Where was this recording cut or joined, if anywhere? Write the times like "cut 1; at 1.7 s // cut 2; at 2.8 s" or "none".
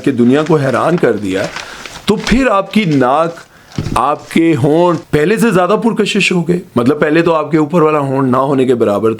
cut 1; at 5.0 s